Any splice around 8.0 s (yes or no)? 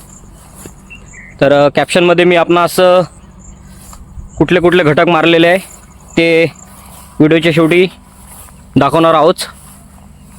no